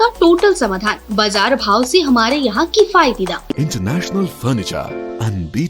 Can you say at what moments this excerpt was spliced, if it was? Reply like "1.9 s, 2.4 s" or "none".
3.5 s